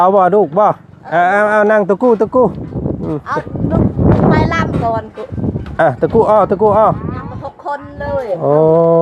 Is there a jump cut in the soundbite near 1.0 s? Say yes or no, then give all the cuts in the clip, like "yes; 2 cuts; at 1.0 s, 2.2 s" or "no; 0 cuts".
no; 0 cuts